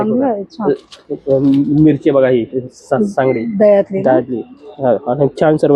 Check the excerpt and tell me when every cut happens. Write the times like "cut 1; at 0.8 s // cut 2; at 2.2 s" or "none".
none